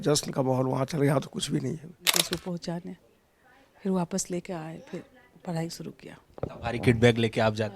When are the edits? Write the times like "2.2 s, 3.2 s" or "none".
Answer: 2.2 s